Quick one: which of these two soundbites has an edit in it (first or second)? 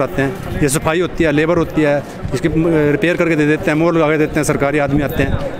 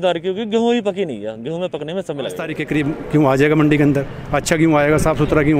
second